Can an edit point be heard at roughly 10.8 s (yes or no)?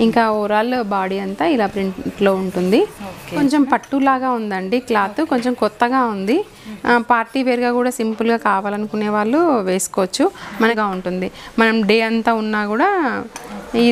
yes